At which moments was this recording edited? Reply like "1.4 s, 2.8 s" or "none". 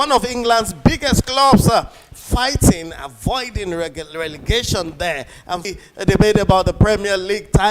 5.6 s